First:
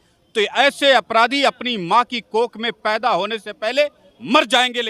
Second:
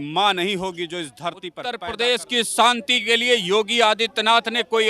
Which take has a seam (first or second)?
second